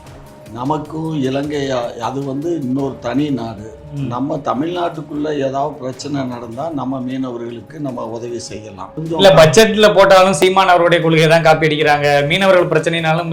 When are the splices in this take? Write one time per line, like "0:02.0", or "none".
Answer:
0:09.0